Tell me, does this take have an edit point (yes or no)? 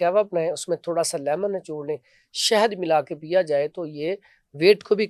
no